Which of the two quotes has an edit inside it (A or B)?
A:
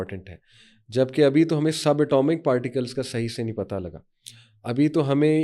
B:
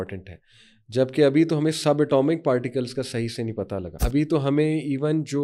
B